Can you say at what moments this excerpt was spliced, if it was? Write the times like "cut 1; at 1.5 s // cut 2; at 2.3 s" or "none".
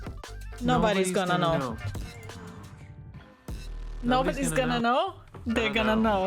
cut 1; at 2.5 s